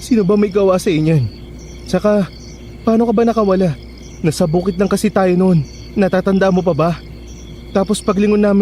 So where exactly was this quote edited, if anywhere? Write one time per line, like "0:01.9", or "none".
none